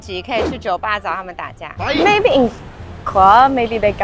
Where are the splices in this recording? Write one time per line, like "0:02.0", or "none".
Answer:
0:01.8